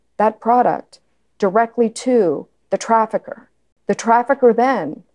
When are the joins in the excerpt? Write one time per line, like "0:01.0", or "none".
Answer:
none